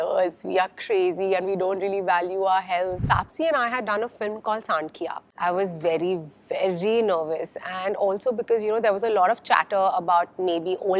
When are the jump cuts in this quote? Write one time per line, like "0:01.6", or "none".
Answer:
0:03.0
0:05.2